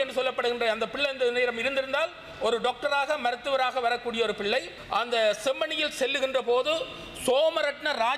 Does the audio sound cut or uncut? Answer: cut